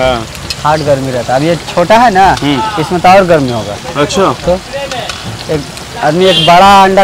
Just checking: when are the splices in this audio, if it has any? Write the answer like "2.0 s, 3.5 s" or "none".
none